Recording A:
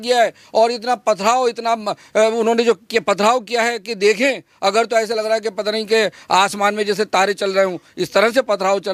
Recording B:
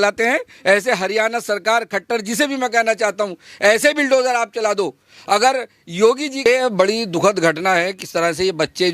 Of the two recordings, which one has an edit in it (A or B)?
B